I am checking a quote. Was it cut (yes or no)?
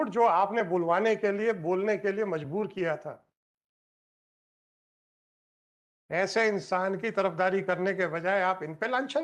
no